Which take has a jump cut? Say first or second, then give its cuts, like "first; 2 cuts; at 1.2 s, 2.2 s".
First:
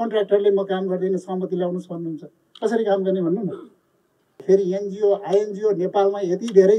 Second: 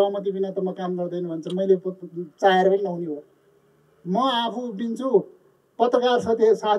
first; 1 cut; at 4.4 s